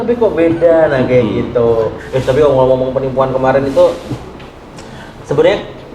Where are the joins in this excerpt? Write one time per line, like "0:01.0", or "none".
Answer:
0:02.0